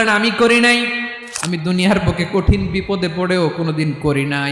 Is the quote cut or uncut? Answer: cut